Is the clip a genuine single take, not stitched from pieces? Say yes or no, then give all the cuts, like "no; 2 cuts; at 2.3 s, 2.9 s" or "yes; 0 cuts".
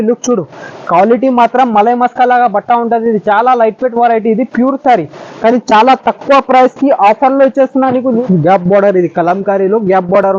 no; 1 cut; at 8.2 s